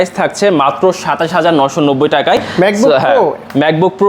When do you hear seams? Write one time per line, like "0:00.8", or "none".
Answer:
none